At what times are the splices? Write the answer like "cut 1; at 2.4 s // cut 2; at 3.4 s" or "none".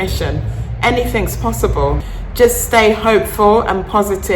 cut 1; at 2.1 s